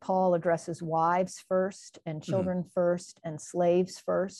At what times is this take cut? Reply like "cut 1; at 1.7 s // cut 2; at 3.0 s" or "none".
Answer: none